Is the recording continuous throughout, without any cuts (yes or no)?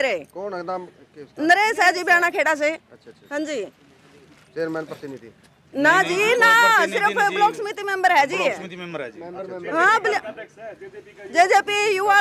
yes